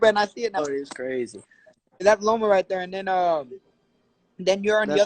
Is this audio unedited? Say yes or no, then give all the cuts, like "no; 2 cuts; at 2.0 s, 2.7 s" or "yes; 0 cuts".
no; 1 cut; at 2.0 s